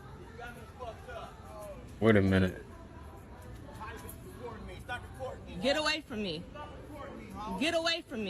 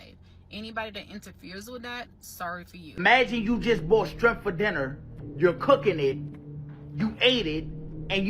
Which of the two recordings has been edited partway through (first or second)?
second